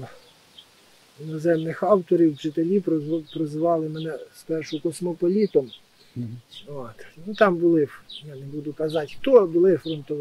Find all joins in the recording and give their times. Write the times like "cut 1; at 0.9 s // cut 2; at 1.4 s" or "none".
none